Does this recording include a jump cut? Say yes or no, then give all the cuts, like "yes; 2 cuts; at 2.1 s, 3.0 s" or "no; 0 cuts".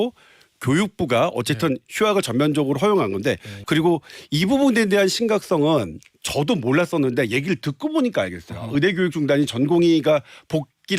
yes; 1 cut; at 3.5 s